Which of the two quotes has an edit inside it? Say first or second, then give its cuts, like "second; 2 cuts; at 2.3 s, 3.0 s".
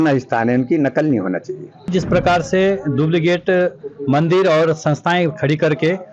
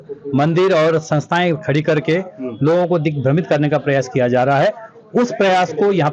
first; 1 cut; at 1.9 s